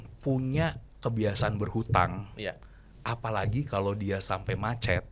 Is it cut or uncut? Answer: uncut